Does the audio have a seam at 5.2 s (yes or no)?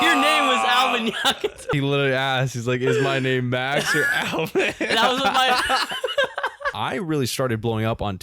no